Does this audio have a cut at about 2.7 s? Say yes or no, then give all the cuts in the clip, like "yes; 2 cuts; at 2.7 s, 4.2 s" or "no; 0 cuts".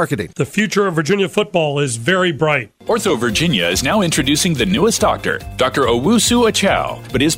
yes; 1 cut; at 2.7 s